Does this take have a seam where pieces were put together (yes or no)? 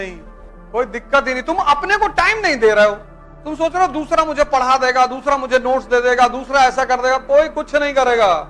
no